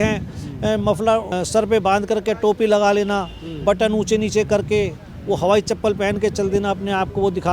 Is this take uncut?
no; 1 cut; at 1.3 s

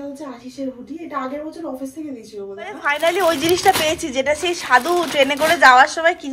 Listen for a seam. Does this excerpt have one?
yes; 1 cut; at 2.9 s

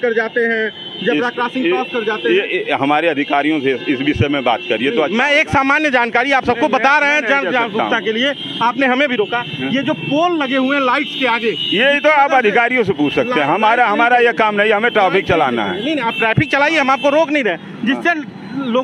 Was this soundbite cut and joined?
no; 0 cuts

